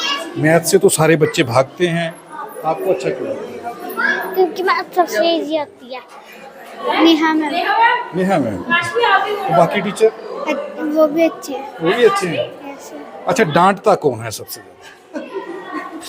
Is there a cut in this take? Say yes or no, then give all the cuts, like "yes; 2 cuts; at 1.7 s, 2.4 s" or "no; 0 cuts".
yes; 1 cut; at 5.8 s